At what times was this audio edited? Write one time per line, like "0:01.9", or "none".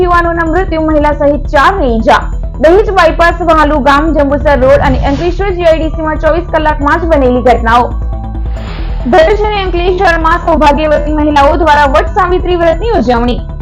none